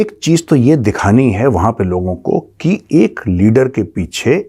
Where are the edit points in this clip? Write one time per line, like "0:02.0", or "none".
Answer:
none